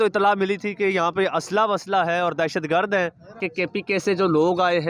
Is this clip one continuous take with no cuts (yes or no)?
no